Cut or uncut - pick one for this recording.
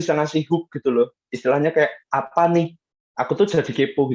uncut